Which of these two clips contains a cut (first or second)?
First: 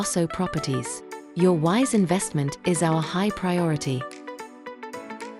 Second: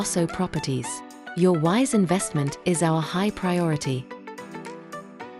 first